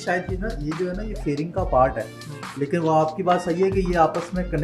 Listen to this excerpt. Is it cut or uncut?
uncut